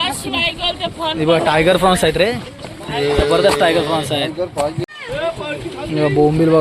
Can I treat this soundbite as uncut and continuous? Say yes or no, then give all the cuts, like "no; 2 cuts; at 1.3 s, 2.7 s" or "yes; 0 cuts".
no; 1 cut; at 4.9 s